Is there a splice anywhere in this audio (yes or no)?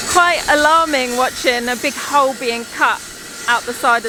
no